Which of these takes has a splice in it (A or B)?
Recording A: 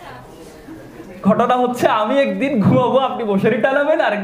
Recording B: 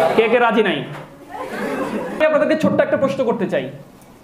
B